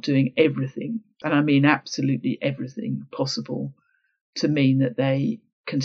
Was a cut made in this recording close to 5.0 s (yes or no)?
no